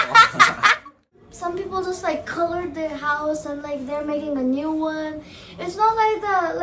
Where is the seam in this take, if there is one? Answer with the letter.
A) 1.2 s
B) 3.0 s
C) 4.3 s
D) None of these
A